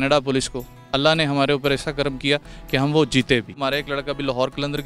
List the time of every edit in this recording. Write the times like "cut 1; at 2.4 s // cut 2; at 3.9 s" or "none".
cut 1; at 3.6 s

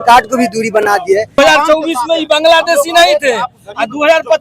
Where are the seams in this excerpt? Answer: cut 1; at 1.3 s

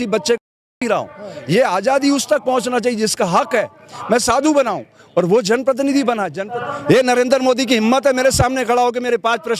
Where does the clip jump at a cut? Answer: cut 1; at 6.4 s

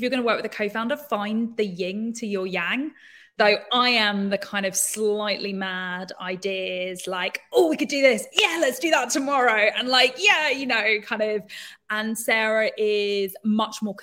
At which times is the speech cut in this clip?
none

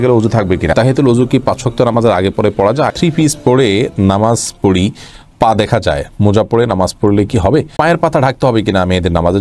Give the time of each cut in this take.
cut 1; at 0.7 s // cut 2; at 2.9 s // cut 3; at 7.7 s

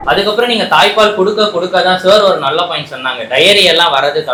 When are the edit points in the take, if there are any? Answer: none

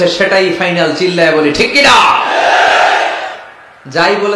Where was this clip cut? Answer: none

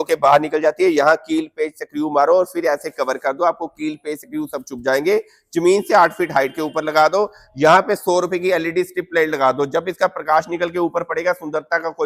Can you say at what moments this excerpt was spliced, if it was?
none

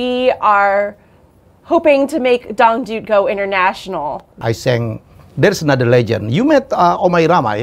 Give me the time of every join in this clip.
cut 1; at 4.3 s

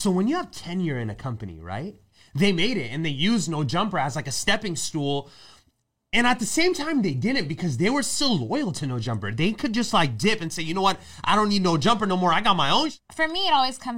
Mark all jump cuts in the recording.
cut 1; at 2.2 s // cut 2; at 13.0 s

